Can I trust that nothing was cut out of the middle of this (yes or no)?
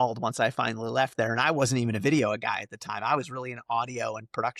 yes